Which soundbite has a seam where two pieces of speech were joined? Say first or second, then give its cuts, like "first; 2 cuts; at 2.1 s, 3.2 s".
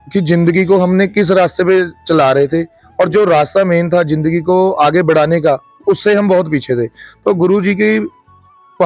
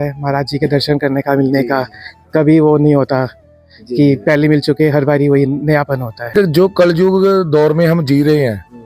second; 1 cut; at 6.2 s